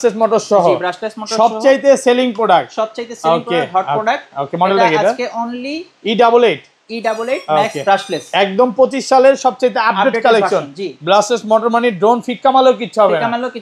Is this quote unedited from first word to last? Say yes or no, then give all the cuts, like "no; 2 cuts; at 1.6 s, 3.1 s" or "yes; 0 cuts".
yes; 0 cuts